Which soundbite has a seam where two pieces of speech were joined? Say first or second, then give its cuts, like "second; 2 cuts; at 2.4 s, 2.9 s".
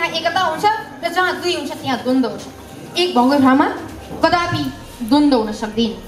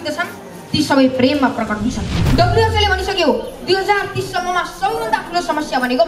second; 1 cut; at 2.1 s